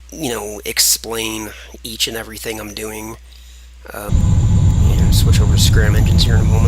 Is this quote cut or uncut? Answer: uncut